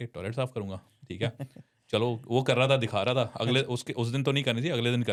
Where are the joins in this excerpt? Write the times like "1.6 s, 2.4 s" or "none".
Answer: none

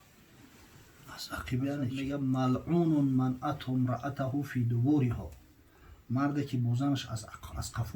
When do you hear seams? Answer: 2.0 s

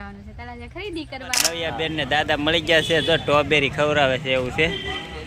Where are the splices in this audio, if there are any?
1.5 s

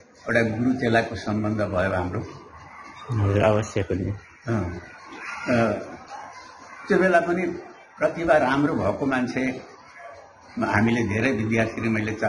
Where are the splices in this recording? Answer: none

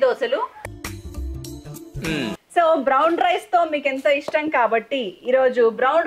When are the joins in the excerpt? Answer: 2.4 s

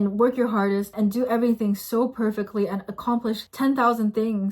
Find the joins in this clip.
0.9 s

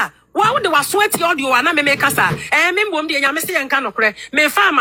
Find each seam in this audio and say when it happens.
none

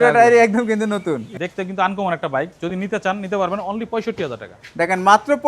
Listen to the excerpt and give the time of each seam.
1.3 s

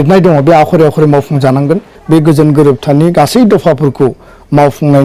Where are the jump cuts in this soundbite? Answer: 1.9 s

